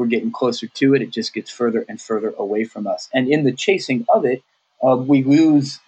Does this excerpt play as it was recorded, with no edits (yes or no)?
yes